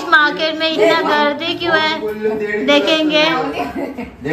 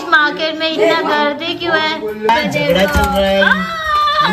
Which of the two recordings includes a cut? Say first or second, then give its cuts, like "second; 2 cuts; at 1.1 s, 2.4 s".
second; 1 cut; at 2.3 s